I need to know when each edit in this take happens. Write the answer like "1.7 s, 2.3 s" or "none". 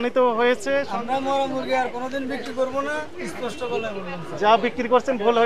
0.9 s